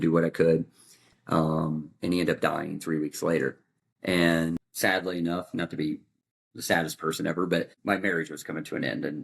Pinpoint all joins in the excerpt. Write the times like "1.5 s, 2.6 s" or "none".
4.7 s, 7.7 s